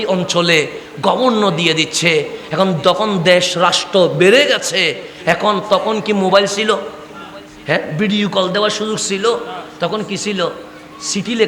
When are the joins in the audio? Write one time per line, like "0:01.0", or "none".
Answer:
none